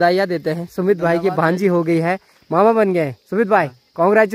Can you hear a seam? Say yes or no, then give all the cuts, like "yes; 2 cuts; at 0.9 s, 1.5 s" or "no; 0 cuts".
no; 0 cuts